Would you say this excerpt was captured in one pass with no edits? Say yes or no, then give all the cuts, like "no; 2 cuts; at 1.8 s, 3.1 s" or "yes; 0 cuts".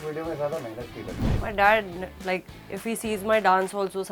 no; 1 cut; at 1.2 s